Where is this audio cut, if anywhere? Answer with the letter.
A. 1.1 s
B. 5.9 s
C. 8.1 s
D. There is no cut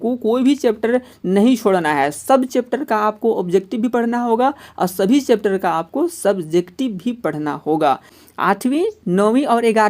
C